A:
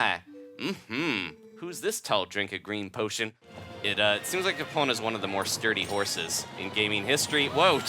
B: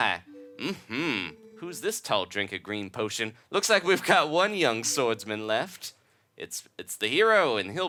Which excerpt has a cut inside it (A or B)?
A